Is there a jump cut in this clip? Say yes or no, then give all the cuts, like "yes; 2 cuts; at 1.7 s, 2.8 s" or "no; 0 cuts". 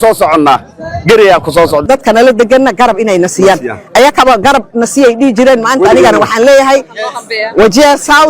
yes; 1 cut; at 1.8 s